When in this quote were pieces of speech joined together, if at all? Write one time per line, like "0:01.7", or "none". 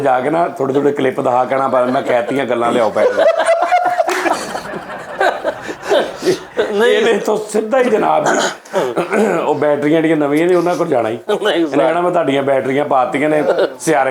none